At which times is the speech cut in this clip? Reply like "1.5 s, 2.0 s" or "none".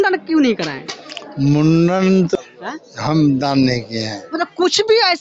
2.4 s